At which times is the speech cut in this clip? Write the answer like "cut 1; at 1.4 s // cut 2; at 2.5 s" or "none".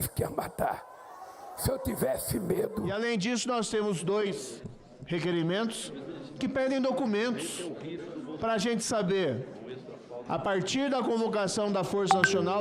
cut 1; at 3.0 s

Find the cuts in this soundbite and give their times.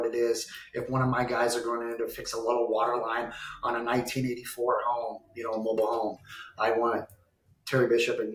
none

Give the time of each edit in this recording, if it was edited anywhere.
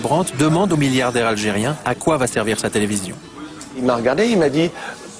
none

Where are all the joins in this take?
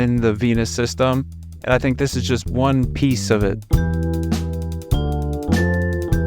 cut 1; at 3.7 s

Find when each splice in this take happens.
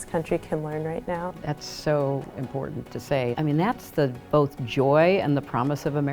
cut 1; at 1.3 s // cut 2; at 3.3 s

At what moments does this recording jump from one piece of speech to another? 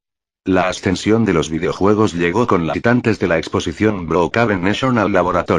none

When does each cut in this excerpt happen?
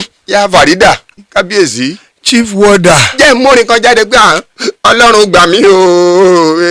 cut 1; at 1.1 s

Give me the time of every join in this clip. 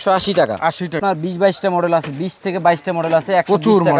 cut 1; at 1.0 s

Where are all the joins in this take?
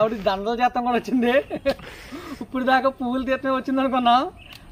none

